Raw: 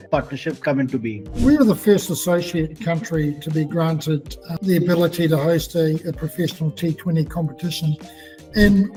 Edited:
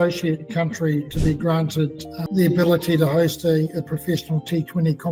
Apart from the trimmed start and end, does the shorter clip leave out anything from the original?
no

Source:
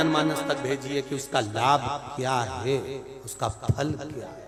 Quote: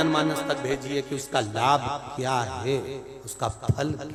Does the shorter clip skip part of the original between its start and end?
no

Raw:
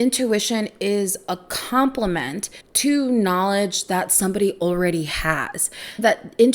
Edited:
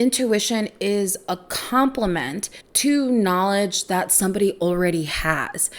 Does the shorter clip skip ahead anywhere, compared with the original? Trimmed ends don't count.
no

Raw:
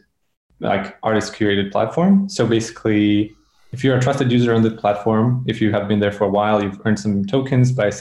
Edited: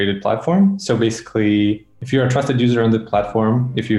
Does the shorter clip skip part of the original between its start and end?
yes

